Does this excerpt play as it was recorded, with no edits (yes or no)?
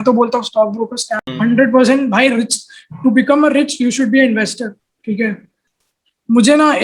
no